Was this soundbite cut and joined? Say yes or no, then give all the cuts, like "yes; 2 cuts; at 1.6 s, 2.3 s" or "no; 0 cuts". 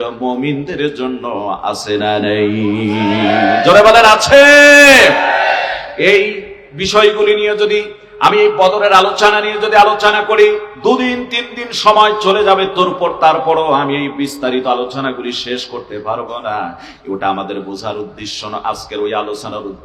no; 0 cuts